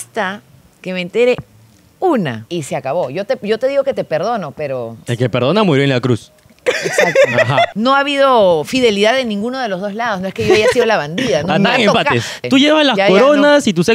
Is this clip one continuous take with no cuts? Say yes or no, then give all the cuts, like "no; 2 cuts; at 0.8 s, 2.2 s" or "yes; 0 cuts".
no; 4 cuts; at 2.4 s, 5.0 s, 7.7 s, 12.4 s